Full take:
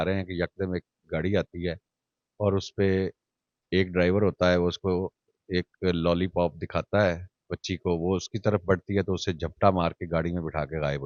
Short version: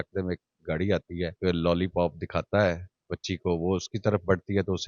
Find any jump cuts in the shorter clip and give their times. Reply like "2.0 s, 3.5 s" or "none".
1.3 s

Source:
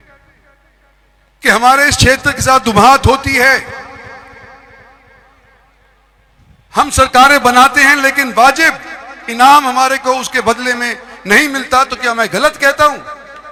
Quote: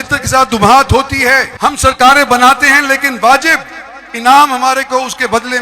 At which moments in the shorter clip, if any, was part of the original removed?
1.5 s

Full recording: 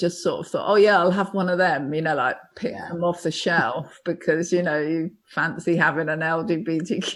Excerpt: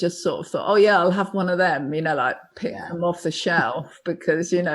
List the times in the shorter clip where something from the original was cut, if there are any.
none

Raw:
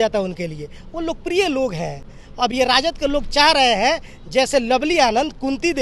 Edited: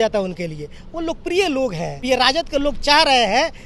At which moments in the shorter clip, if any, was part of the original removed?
2.0 s

